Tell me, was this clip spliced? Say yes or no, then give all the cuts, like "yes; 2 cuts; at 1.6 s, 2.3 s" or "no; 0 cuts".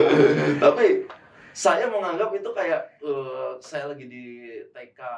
no; 0 cuts